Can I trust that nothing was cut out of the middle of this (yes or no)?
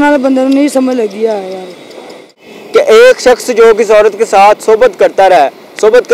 no